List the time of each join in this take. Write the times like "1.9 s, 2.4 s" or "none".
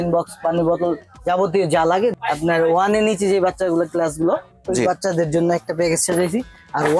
2.1 s